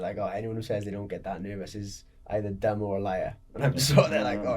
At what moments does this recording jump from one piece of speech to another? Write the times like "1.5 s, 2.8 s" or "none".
none